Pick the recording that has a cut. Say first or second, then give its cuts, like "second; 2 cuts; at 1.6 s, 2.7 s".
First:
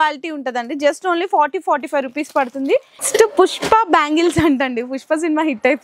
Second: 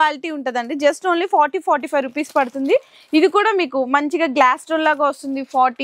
first; 1 cut; at 3.0 s